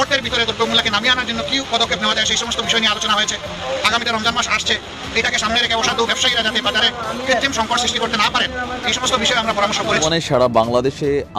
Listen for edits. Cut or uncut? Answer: cut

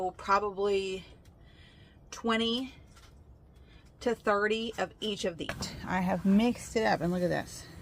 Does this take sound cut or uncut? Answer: cut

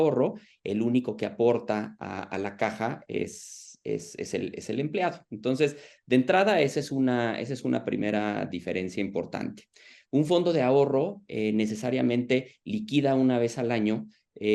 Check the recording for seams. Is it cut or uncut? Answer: uncut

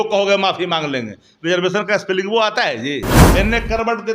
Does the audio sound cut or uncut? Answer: cut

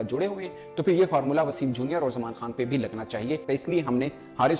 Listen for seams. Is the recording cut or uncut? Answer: cut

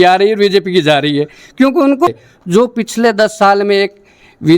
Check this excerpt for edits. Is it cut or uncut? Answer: cut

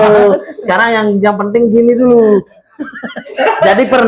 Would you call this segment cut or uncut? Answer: uncut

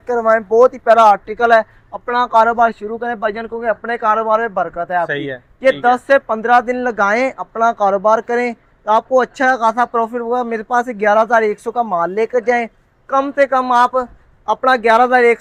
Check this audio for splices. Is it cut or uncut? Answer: uncut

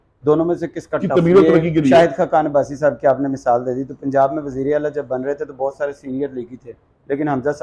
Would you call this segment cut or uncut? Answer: cut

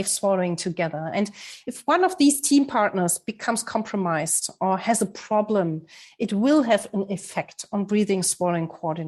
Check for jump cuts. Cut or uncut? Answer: uncut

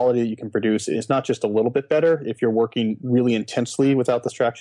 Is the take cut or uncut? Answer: uncut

